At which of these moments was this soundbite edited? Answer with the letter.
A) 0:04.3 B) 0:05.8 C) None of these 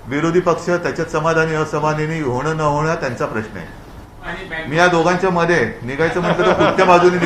A